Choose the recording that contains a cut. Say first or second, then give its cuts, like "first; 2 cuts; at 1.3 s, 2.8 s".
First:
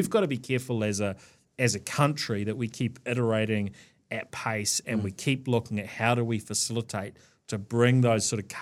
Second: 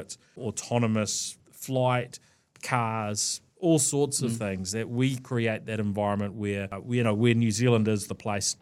second; 1 cut; at 6.7 s